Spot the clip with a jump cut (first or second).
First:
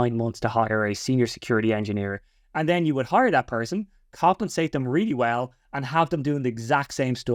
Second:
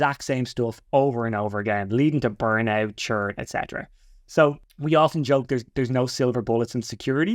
second